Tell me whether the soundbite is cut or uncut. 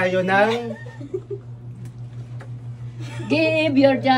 uncut